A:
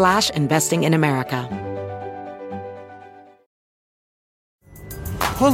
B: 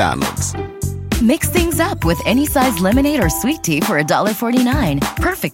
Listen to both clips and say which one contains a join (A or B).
A